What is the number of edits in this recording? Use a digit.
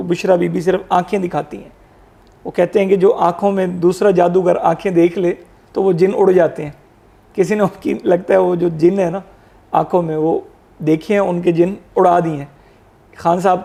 0